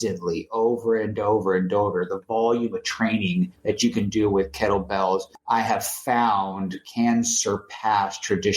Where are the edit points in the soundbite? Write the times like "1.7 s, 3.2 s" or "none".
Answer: 3.6 s, 5.3 s